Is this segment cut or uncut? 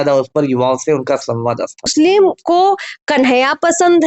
cut